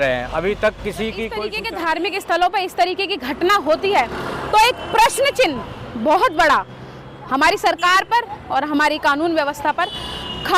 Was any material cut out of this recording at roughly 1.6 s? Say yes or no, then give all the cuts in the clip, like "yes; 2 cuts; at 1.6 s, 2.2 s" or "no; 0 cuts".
yes; 1 cut; at 1.6 s